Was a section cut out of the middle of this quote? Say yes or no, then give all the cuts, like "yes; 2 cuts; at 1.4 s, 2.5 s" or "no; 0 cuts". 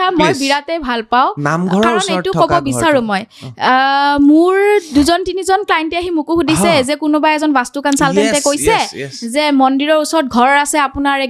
no; 0 cuts